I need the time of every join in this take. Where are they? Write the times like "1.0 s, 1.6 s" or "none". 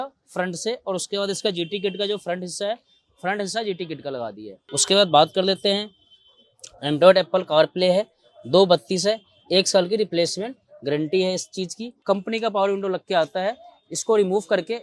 4.3 s, 11.9 s